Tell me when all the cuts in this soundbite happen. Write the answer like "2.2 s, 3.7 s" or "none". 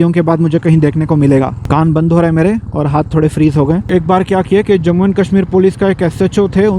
1.6 s, 3.8 s